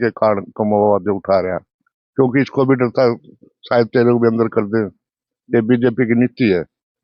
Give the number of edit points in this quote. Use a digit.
0